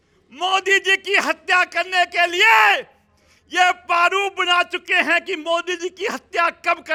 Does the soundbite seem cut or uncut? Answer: uncut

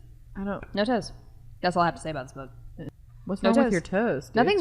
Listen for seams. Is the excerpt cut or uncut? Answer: cut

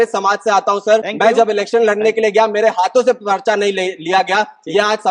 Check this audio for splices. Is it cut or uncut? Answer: cut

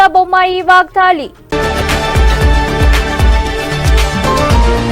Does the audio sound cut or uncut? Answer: cut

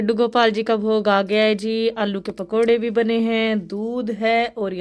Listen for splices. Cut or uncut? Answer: uncut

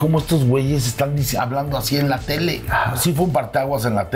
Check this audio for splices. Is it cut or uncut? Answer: cut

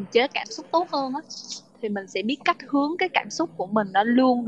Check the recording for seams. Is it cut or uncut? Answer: uncut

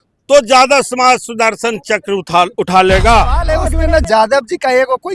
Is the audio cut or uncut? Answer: cut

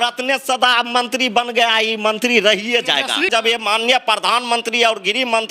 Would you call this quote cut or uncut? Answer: cut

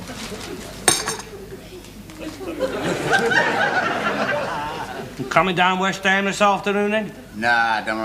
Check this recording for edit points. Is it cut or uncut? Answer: cut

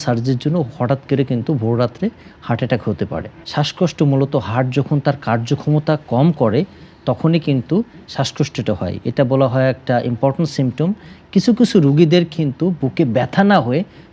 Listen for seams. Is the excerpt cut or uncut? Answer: cut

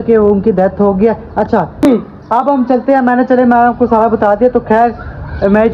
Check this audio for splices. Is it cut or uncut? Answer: cut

